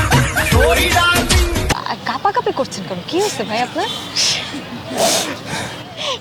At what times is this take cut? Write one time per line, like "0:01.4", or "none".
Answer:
0:01.7